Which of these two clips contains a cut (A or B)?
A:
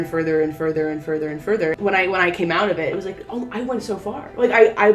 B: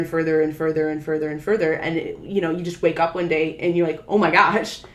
A